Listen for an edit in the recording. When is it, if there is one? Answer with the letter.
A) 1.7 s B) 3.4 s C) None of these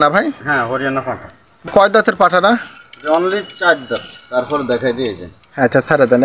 A